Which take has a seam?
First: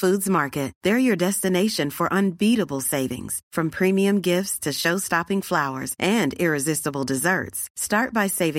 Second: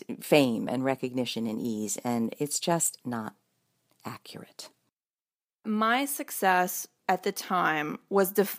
second; 2 cuts; at 5.6 s, 6.9 s

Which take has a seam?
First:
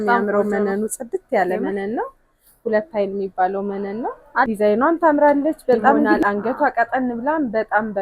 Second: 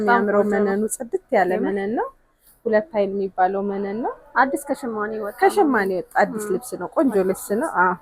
first; 2 cuts; at 4.5 s, 6.2 s

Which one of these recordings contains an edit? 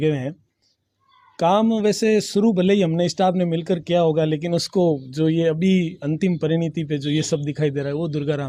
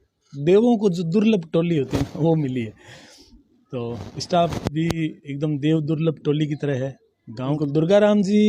second; 1 cut; at 7.6 s

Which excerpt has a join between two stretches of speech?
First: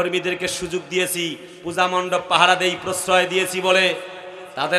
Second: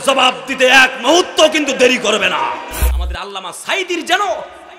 second; 1 cut; at 2.9 s

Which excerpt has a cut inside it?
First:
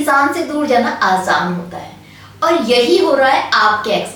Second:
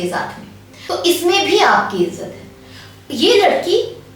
second; 1 cut; at 0.9 s

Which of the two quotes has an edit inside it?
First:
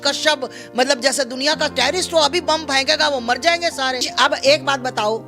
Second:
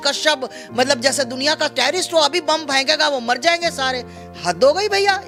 first; 1 cut; at 4.1 s

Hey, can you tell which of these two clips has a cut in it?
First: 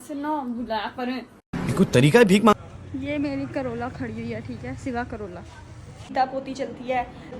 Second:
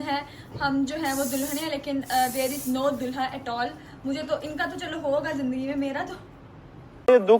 first; 2 cuts; at 2.5 s, 6.1 s

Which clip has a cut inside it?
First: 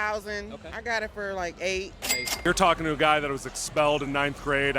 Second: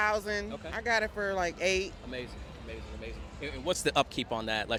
first; 1 cut; at 2.2 s

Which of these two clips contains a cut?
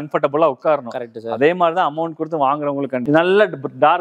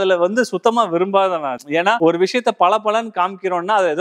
first; 1 cut; at 3.0 s

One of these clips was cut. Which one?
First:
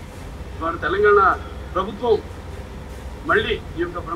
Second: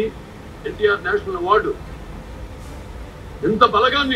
second; 1 cut; at 3.2 s

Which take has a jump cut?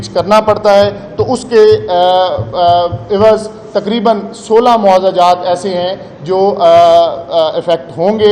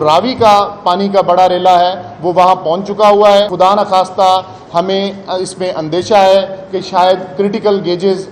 second; 1 cut; at 3.5 s

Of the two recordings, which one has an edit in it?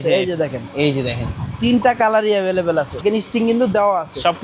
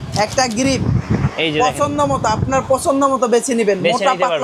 first; 1 cut; at 3.0 s

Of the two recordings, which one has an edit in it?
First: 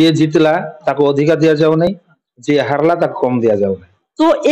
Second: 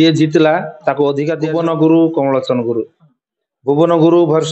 second; 1 cut; at 1.4 s

